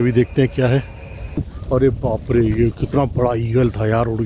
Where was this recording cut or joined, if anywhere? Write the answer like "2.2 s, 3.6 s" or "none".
1.6 s